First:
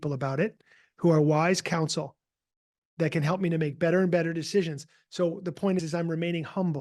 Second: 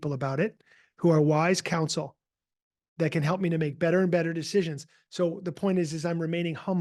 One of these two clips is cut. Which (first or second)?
first